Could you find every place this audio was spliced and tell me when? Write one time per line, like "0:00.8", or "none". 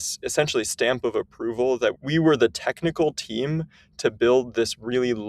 0:02.0